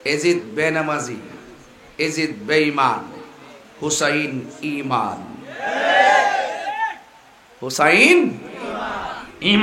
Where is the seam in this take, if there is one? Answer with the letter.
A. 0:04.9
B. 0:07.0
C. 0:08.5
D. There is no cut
D